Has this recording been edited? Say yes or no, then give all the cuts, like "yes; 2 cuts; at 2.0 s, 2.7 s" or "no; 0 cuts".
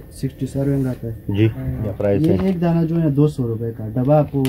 yes; 1 cut; at 2.0 s